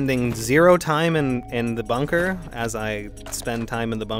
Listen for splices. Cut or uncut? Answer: uncut